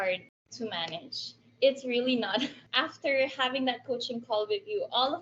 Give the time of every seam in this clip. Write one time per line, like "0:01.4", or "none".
0:02.6